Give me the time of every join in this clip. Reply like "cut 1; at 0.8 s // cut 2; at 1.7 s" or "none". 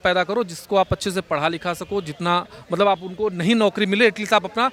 none